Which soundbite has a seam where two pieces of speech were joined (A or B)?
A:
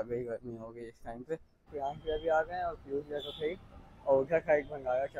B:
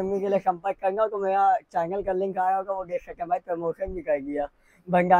A